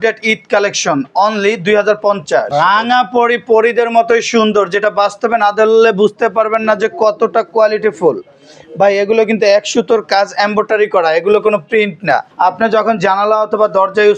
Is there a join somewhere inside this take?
yes; 2 cuts; at 2.5 s, 12.3 s

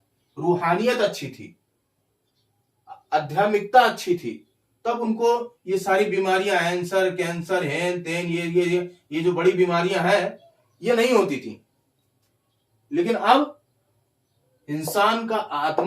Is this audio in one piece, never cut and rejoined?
yes; 0 cuts

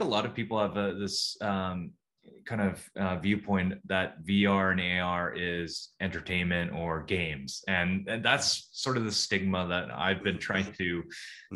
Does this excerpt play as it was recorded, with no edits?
yes; 0 cuts

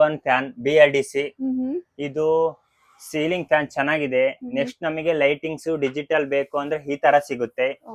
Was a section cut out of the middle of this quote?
no; 0 cuts

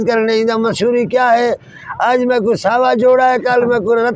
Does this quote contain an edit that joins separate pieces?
no; 0 cuts

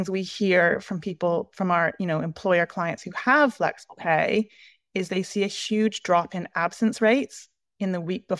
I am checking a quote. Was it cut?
no; 0 cuts

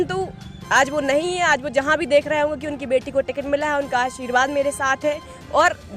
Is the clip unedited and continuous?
yes; 0 cuts

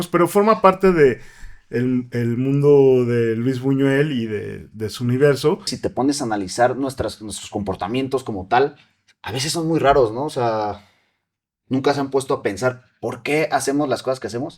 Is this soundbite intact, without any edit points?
no; 1 cut; at 5.8 s

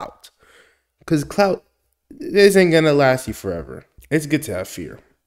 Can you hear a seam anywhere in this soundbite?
yes; 1 cut; at 4.0 s

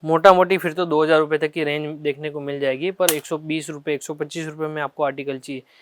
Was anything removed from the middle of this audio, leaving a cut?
no; 0 cuts

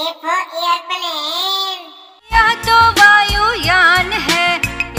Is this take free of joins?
yes; 0 cuts

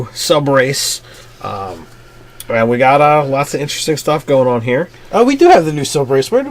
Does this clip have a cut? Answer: no; 0 cuts

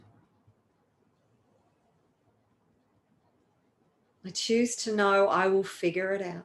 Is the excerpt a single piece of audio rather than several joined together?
yes; 0 cuts

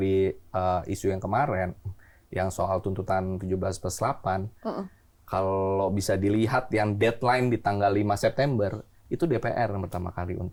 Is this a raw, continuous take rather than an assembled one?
yes; 0 cuts

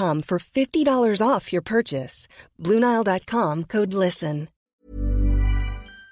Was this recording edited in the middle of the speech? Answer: yes; 1 cut; at 4.7 s

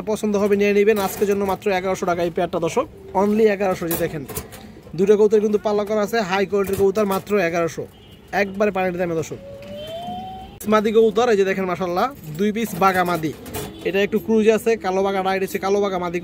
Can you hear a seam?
no; 0 cuts

